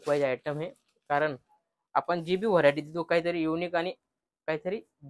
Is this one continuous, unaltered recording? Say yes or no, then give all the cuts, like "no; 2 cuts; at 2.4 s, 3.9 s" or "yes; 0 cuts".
yes; 0 cuts